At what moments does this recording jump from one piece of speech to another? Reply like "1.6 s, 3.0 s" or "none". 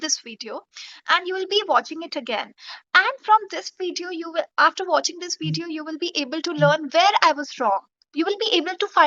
none